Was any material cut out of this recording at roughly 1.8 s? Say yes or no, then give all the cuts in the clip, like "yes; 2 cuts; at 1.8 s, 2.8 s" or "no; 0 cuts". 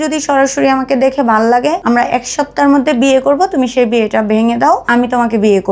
yes; 2 cuts; at 1.8 s, 4.8 s